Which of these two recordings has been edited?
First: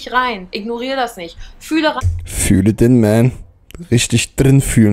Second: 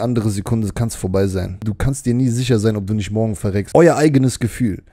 second; 2 cuts; at 1.7 s, 3.6 s

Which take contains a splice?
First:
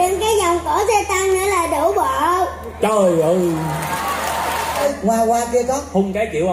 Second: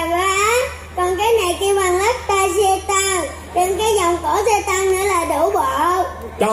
first; 1 cut; at 4.8 s

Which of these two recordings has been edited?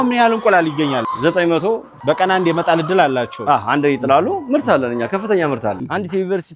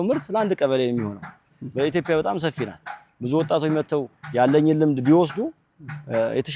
first; 3 cuts; at 1.0 s, 1.9 s, 5.8 s

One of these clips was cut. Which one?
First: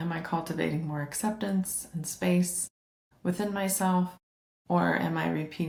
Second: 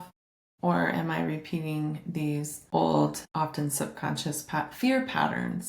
second; 2 cuts; at 2.6 s, 3.2 s

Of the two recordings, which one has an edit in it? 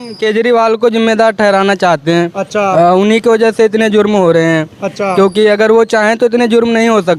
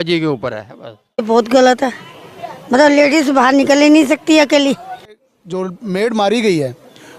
second; 2 cuts; at 1.2 s, 5.2 s

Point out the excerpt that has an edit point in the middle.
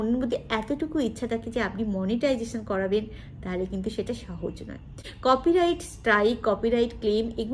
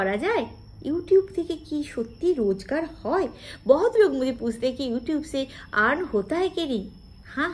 first; 1 cut; at 5.1 s

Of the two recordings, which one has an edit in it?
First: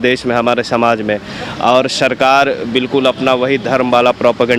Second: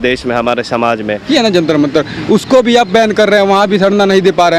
second; 1 cut; at 1.3 s

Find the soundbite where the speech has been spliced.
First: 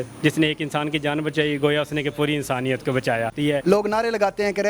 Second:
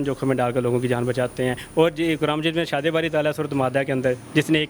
first; 1 cut; at 3.4 s

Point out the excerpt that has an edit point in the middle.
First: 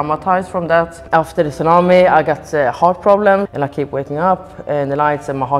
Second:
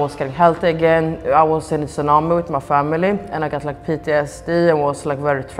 first; 2 cuts; at 1.0 s, 3.5 s

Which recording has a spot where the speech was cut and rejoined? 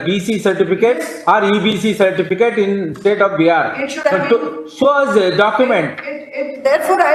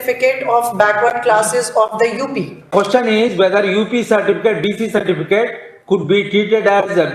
second; 1 cut; at 2.7 s

